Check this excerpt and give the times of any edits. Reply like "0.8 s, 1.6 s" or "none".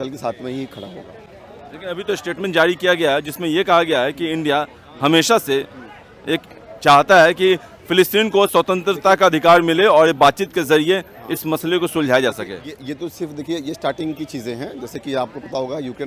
none